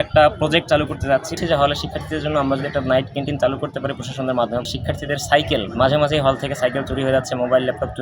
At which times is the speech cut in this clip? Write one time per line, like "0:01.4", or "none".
0:01.4
0:04.7